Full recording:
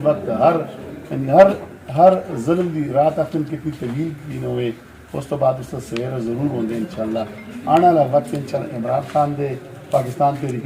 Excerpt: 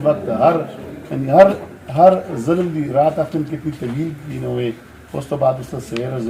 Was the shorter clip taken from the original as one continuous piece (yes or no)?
yes